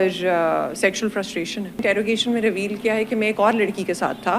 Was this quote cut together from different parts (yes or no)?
yes